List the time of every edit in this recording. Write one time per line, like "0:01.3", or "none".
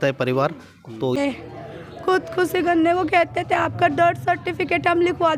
0:01.2